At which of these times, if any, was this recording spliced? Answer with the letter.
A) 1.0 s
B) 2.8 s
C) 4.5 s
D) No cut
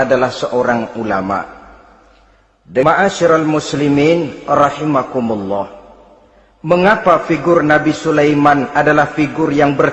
B